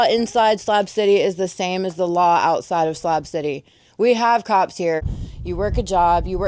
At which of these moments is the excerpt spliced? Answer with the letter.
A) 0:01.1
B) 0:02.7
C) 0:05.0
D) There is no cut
C